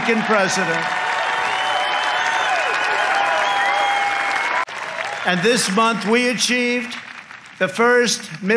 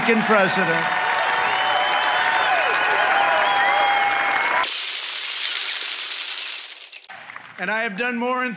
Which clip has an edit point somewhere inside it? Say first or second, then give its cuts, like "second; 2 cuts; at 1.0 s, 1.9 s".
first; 1 cut; at 4.8 s